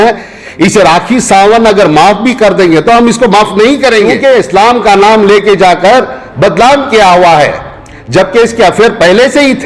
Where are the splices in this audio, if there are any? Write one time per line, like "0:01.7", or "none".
0:04.1